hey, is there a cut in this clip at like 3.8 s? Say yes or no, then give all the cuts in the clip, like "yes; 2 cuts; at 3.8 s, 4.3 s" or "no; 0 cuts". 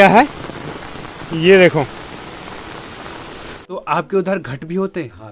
yes; 1 cut; at 3.8 s